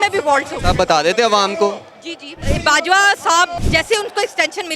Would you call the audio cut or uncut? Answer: cut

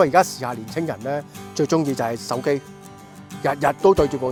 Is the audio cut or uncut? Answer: uncut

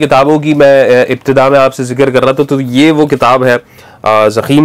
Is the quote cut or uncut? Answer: uncut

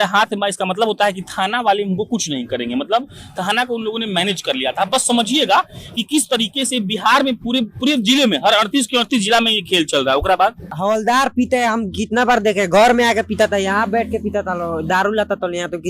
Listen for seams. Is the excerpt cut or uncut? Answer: cut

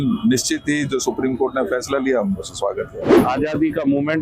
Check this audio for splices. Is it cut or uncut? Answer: cut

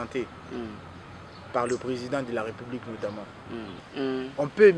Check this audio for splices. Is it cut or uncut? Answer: cut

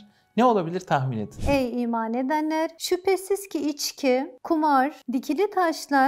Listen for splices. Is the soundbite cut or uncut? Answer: cut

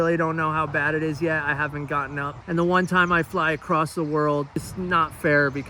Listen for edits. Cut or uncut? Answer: cut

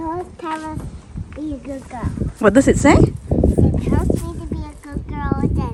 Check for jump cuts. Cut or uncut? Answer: uncut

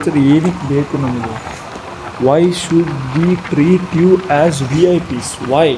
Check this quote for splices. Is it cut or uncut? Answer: uncut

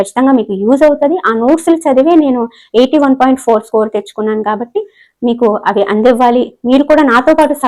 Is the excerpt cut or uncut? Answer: uncut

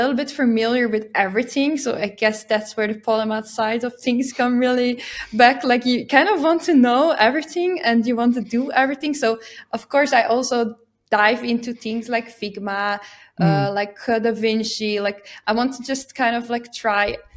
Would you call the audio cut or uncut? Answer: uncut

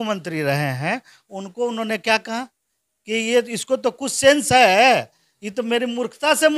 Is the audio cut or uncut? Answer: uncut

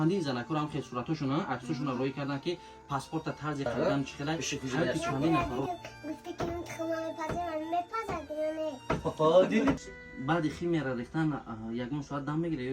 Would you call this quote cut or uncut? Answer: cut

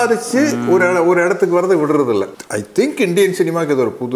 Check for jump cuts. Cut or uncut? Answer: cut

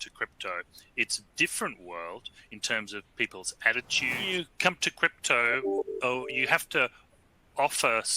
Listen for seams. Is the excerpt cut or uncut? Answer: cut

